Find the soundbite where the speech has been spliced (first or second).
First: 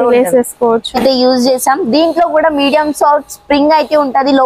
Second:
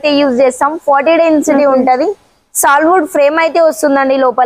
first